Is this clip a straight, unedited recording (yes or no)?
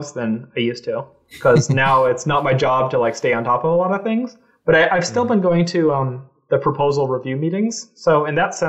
yes